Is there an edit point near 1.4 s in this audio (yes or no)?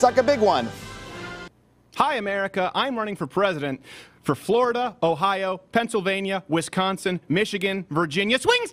yes